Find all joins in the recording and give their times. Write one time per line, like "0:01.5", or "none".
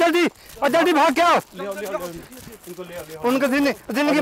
none